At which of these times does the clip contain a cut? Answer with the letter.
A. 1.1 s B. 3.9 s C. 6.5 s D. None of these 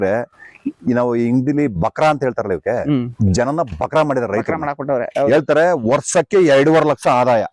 D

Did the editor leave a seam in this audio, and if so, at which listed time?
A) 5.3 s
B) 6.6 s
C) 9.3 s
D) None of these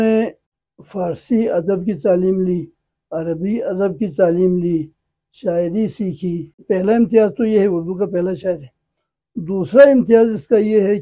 B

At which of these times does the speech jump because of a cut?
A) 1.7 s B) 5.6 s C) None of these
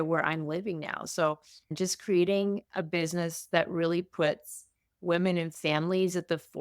A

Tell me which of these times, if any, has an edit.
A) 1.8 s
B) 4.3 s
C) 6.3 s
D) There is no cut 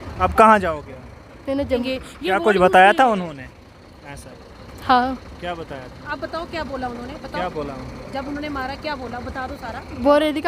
A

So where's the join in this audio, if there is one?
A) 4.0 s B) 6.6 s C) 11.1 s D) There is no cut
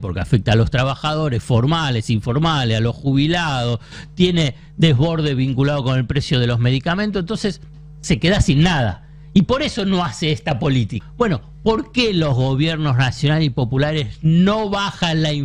C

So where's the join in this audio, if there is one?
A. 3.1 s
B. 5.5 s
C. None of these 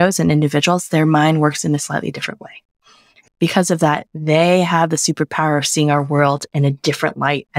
A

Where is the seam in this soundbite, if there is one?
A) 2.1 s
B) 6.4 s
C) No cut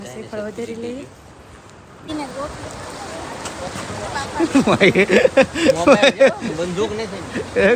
A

